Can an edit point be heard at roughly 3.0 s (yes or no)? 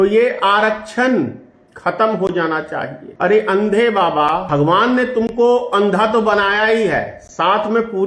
yes